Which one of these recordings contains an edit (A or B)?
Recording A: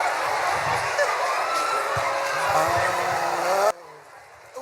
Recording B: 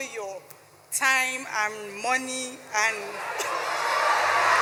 A